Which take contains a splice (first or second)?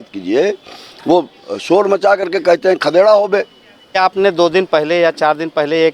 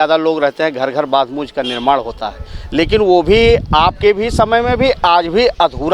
first